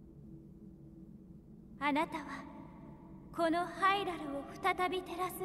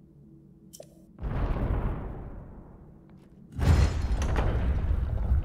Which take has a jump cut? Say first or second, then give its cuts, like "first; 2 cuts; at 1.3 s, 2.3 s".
first; 1 cut; at 1.2 s